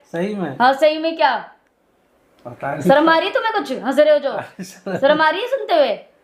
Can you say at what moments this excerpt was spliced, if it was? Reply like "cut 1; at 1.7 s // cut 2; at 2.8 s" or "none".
none